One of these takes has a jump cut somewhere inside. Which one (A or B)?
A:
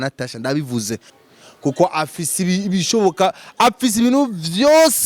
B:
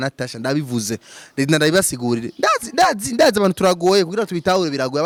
A